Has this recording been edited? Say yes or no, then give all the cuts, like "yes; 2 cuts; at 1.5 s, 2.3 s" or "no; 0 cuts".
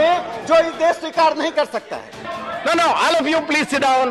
yes; 1 cut; at 2.4 s